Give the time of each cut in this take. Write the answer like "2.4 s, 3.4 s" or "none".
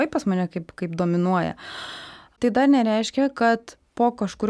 2.3 s